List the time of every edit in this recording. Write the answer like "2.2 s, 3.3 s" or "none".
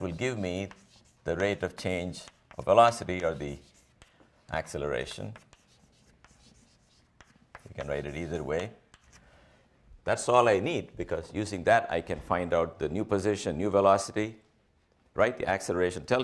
8.4 s